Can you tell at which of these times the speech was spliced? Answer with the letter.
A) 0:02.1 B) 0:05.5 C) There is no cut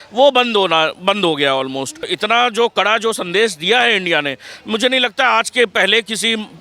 A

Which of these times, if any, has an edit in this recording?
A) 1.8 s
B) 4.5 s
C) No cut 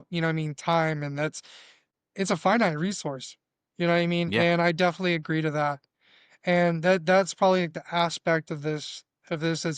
A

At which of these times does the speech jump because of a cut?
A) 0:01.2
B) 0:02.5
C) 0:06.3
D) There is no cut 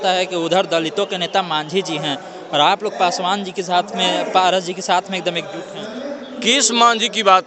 C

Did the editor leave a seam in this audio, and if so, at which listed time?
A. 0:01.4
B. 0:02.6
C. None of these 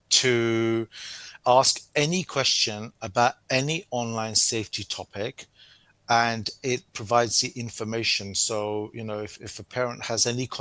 A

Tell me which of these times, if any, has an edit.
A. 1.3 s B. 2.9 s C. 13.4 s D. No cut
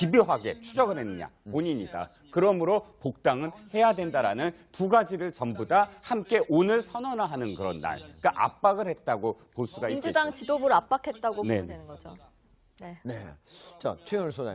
C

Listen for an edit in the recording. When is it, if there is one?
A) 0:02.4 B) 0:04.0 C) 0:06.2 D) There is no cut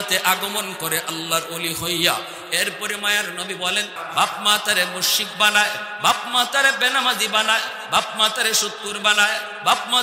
B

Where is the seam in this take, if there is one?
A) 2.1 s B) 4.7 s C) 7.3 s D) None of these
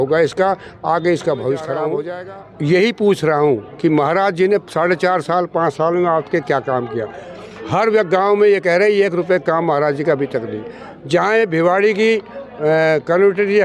A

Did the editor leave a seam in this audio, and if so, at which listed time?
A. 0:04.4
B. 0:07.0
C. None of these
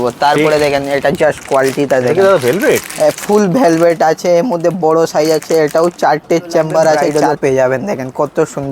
B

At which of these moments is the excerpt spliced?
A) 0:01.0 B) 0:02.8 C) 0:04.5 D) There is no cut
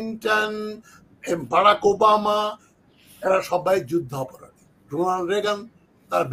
D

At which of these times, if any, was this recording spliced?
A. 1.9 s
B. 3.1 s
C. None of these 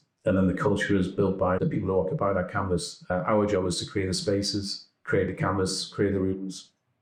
C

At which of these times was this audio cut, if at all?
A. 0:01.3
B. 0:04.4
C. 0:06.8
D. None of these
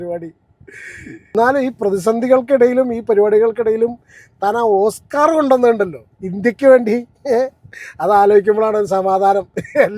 A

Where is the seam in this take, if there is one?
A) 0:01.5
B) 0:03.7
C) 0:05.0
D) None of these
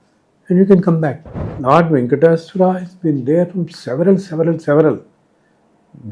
A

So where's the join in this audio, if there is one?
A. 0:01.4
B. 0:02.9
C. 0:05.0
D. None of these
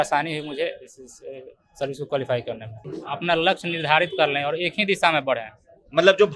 B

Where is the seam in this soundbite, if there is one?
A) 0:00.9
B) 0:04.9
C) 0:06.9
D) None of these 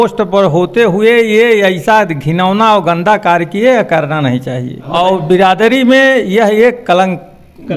B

